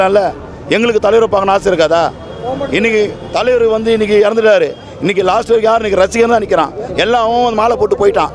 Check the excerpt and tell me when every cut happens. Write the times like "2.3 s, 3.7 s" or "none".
none